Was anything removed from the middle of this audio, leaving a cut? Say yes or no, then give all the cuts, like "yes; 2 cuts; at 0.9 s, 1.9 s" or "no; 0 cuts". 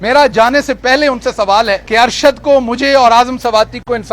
yes; 1 cut; at 1.8 s